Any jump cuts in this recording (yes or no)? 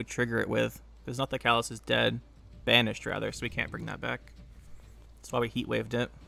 no